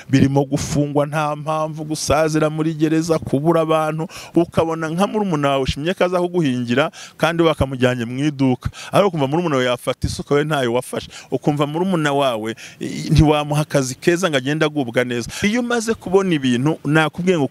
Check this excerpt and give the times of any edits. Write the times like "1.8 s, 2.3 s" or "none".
4.2 s, 15.4 s